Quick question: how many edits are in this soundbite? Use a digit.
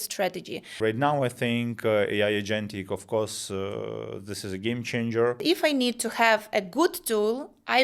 2